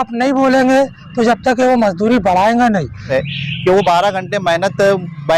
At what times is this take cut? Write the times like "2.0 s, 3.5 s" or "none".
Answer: 3.2 s